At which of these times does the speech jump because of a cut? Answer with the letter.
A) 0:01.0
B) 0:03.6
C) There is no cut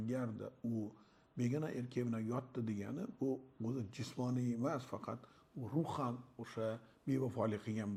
C